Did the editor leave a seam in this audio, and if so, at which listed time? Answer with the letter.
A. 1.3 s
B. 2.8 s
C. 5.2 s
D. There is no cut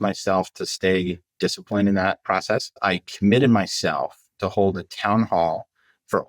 B